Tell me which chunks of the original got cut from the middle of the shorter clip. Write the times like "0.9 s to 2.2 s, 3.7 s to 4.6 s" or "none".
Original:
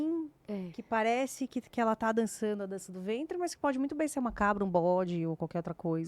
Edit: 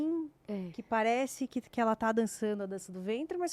none